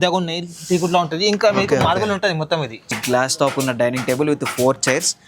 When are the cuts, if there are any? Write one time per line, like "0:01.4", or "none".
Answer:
0:03.0